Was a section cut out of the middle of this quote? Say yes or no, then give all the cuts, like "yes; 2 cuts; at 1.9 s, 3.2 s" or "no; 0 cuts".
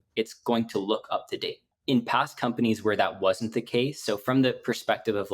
yes; 1 cut; at 1.7 s